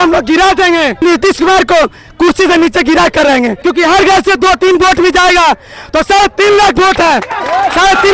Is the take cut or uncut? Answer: cut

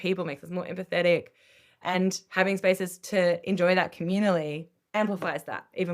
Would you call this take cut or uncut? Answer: cut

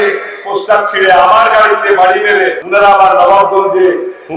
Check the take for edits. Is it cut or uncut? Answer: cut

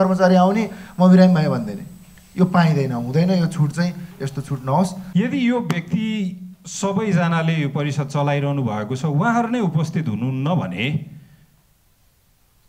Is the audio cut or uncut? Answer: cut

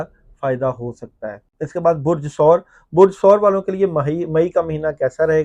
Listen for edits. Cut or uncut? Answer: uncut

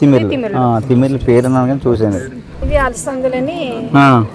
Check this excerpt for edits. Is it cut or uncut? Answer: uncut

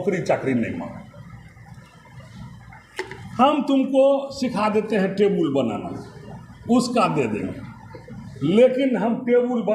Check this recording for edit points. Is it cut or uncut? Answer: uncut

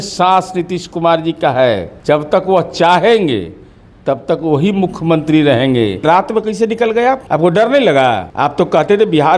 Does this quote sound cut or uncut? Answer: cut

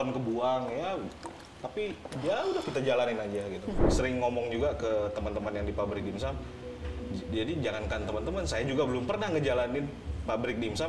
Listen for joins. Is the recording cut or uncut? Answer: cut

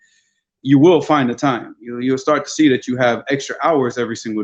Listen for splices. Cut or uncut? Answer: uncut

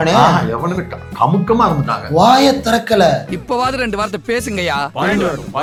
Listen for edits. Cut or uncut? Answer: uncut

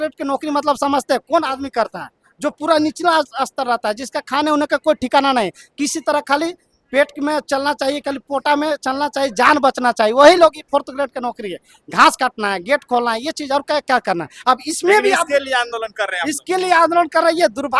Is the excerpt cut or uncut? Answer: uncut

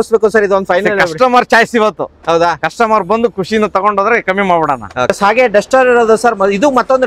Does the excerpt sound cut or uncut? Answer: uncut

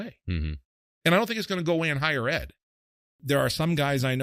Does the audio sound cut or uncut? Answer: cut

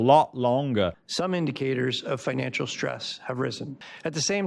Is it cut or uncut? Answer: cut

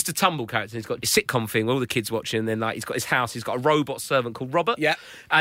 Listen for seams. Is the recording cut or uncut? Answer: cut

